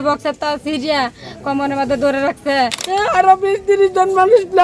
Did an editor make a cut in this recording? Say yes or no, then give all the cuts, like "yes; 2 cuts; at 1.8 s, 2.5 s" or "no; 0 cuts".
yes; 1 cut; at 2.8 s